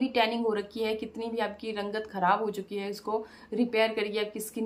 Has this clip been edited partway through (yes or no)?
no